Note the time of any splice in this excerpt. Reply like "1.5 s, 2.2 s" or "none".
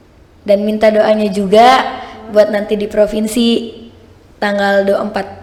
none